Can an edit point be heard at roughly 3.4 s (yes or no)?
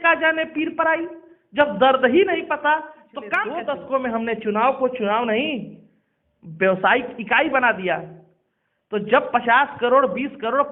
yes